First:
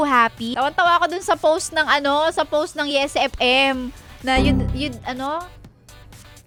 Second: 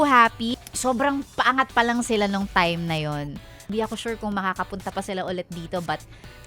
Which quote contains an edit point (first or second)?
second